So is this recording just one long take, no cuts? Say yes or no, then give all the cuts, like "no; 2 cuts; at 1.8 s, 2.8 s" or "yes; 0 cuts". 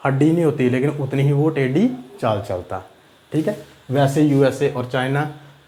yes; 0 cuts